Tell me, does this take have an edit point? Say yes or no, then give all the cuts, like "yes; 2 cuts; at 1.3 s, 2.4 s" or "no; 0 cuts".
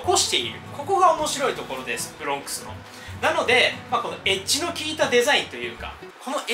no; 0 cuts